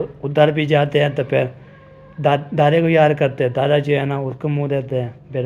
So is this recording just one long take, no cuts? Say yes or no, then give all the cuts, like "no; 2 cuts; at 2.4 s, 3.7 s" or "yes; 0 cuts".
yes; 0 cuts